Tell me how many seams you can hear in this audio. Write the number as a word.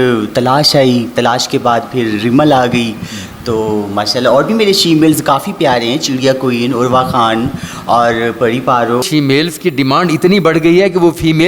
one